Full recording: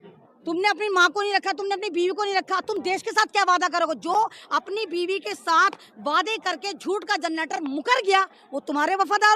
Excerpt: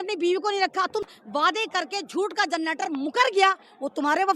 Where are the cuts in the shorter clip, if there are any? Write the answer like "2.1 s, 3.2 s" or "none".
1.0 s

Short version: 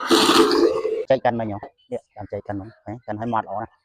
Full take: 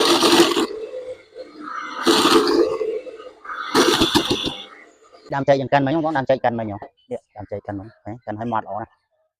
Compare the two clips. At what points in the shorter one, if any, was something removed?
1.1 s

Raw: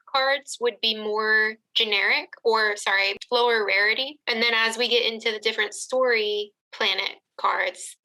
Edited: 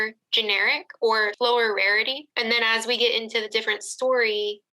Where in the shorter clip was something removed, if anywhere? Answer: 1.3 s

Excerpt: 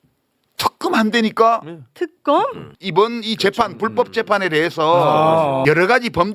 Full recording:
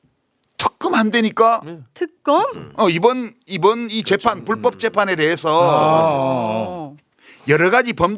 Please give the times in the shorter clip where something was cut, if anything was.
2.6 s, 5.6 s

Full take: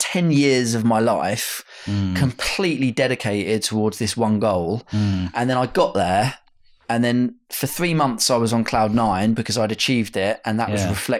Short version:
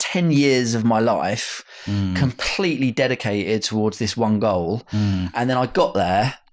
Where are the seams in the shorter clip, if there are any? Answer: none

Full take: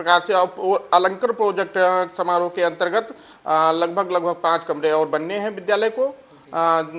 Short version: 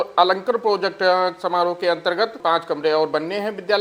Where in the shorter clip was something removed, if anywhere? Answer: 2.4 s

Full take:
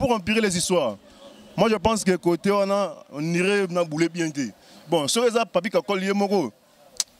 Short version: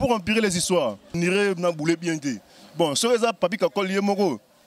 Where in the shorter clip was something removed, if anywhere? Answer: 1.1 s

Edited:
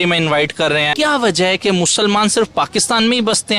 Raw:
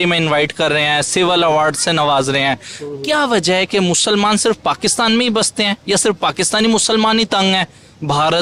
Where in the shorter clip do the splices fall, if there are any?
0.9 s

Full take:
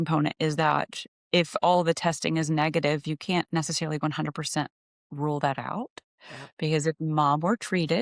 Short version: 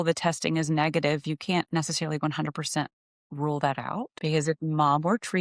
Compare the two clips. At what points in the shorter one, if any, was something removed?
4.1 s

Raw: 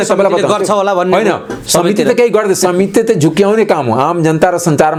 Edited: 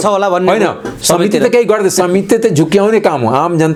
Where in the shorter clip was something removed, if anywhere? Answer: none

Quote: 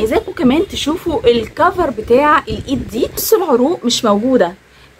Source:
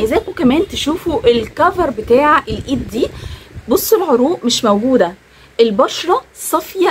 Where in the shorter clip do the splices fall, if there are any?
3.2 s

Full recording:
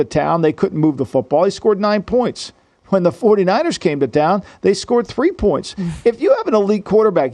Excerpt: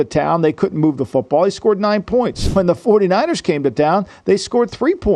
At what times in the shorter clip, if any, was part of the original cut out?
2.4 s

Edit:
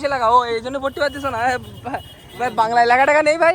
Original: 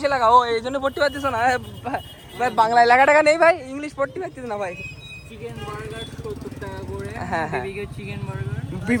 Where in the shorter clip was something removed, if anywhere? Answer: none

